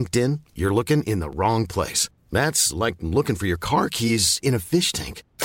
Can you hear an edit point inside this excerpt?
no; 0 cuts

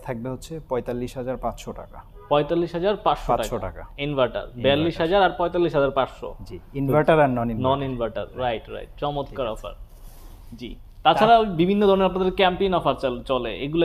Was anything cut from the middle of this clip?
no; 0 cuts

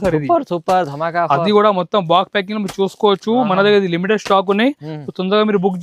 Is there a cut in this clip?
no; 0 cuts

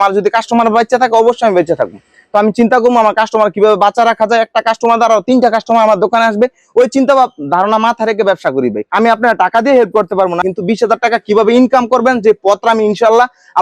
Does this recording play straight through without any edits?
no; 1 cut; at 8.8 s

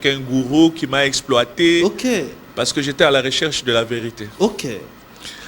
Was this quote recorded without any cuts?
yes; 0 cuts

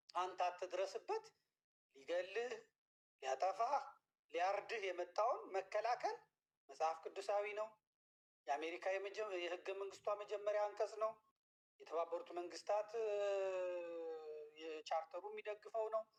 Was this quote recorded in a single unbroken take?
yes; 0 cuts

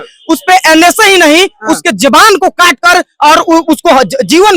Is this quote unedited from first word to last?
yes; 0 cuts

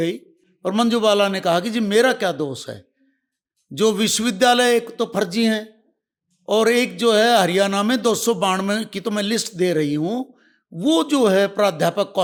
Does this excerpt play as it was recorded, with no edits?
yes; 0 cuts

